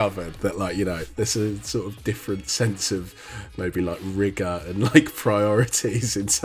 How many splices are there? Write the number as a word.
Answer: one